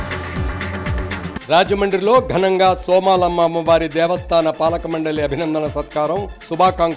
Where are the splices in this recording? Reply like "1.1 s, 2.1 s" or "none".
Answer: 1.1 s